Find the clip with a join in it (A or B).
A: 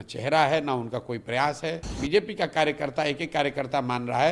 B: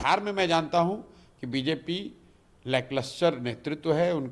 A